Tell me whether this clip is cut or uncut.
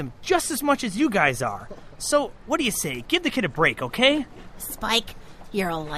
uncut